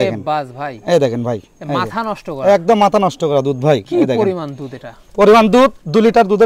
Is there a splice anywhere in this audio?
no; 0 cuts

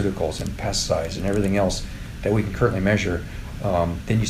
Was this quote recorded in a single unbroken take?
yes; 0 cuts

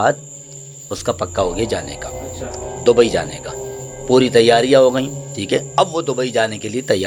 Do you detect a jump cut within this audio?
no; 0 cuts

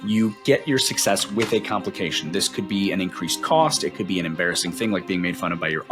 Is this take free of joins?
yes; 0 cuts

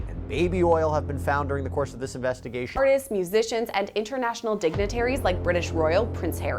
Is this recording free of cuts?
no; 1 cut; at 2.8 s

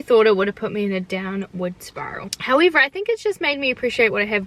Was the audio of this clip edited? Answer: no; 0 cuts

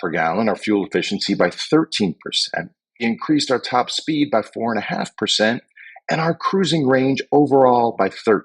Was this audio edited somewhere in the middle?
yes; 1 cut; at 3.0 s

